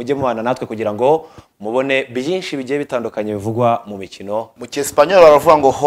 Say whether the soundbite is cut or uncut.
cut